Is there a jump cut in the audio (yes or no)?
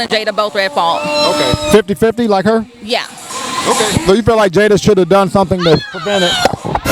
no